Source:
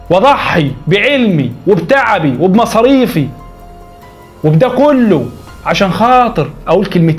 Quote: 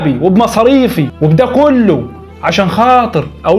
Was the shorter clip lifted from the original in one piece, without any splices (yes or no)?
no